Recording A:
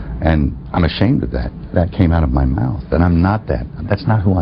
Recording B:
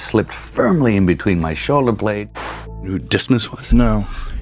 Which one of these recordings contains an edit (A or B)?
B